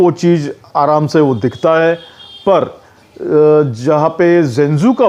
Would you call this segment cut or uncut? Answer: uncut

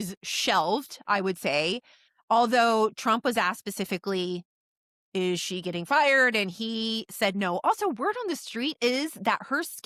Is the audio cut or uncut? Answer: uncut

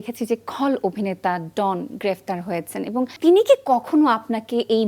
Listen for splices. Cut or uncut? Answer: cut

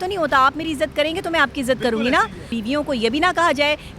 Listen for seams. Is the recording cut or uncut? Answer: cut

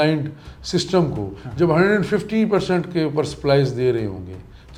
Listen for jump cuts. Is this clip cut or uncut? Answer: uncut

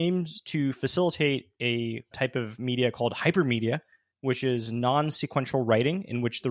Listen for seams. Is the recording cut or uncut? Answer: cut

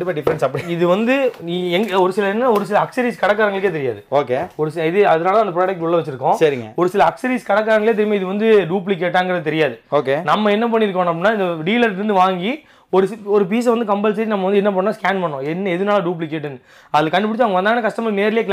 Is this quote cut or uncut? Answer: uncut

